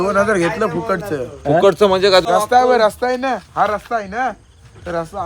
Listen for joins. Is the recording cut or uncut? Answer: cut